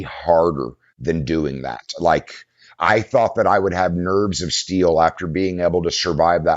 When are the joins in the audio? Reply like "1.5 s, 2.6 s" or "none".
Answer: 2.8 s